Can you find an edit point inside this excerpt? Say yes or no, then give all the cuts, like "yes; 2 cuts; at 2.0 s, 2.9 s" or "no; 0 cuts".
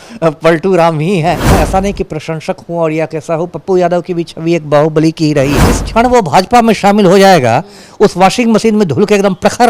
yes; 2 cuts; at 1.5 s, 5.7 s